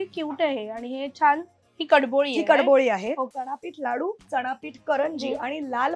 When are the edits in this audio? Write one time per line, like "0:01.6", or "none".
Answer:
0:03.4